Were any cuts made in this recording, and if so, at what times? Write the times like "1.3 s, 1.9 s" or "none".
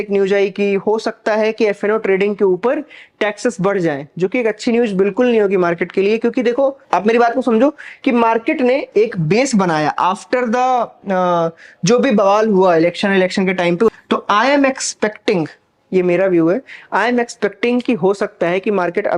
6.9 s, 14.0 s